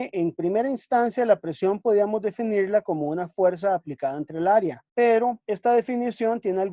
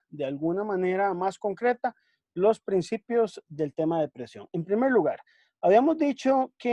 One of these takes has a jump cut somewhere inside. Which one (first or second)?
first